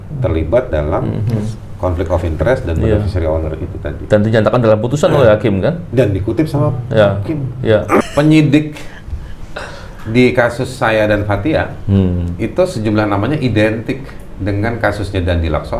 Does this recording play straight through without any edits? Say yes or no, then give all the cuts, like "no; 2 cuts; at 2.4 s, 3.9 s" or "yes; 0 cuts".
no; 1 cut; at 8.0 s